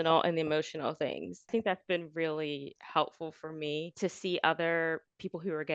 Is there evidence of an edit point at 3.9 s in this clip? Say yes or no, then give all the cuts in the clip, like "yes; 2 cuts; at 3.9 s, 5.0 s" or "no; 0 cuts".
yes; 2 cuts; at 1.5 s, 3.9 s